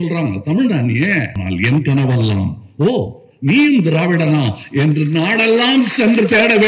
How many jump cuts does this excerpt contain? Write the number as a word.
one